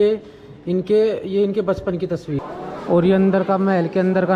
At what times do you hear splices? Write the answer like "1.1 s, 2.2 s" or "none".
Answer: 2.4 s